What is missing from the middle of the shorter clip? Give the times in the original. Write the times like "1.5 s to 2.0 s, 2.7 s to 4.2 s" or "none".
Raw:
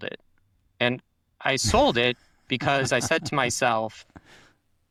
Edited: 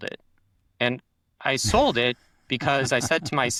none